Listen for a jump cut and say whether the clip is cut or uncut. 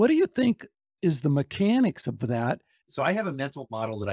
cut